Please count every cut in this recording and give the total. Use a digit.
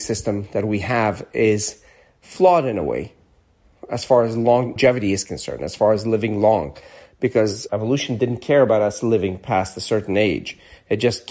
2